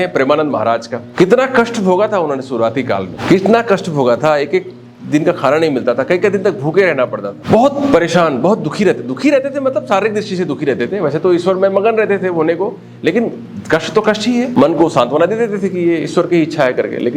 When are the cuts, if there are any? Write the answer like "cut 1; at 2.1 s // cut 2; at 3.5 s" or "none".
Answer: cut 1; at 1.0 s // cut 2; at 3.1 s // cut 3; at 7.3 s // cut 4; at 14.5 s